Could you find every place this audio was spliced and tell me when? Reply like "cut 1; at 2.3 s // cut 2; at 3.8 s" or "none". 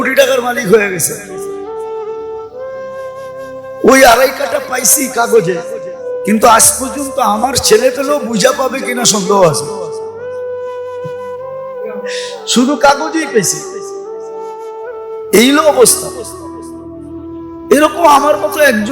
cut 1; at 1.6 s // cut 2; at 3.8 s // cut 3; at 9.5 s // cut 4; at 11.1 s // cut 5; at 12.5 s // cut 6; at 13.5 s // cut 7; at 15.3 s // cut 8; at 15.9 s // cut 9; at 17.7 s